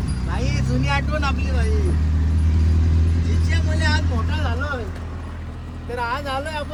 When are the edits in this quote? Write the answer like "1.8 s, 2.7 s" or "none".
none